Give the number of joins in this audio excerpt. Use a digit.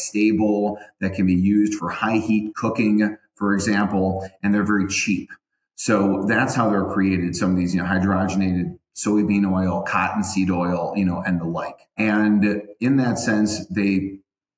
2